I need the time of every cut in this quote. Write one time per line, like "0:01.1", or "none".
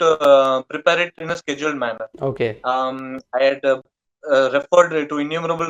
none